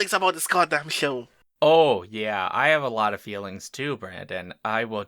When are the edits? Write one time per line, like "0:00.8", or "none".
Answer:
none